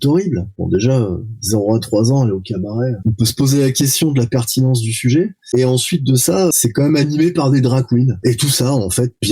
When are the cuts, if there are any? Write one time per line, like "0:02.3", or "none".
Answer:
0:03.0
0:06.5
0:08.1